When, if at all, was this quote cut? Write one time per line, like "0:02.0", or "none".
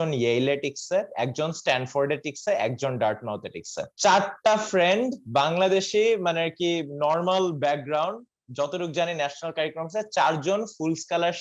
none